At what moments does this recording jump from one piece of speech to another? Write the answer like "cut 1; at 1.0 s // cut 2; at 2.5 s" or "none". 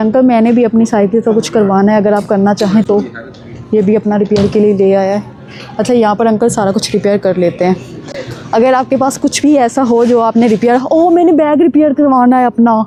none